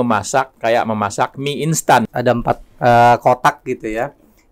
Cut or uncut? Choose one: cut